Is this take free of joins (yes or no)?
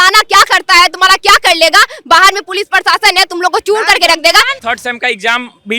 no